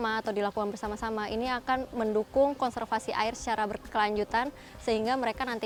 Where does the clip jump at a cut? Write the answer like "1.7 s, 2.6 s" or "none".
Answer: none